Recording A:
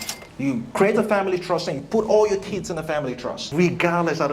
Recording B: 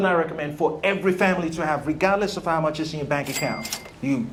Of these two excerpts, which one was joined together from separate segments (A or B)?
A